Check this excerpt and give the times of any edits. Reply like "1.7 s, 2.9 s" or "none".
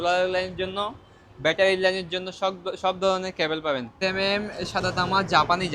3.9 s